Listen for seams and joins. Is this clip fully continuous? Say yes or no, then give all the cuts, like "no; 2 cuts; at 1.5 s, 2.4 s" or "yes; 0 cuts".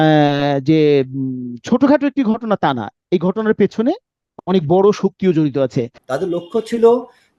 no; 1 cut; at 5.9 s